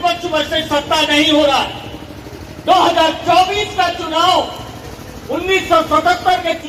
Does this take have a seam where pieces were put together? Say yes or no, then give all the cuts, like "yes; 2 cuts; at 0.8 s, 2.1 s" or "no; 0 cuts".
no; 0 cuts